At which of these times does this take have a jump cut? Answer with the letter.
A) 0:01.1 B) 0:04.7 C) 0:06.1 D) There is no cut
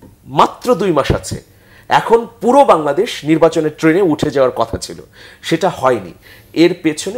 D